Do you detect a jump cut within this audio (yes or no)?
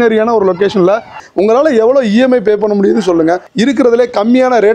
yes